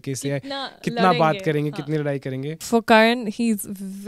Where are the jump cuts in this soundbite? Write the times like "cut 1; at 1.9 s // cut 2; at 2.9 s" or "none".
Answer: cut 1; at 2.6 s